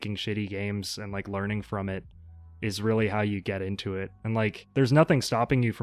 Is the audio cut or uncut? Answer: uncut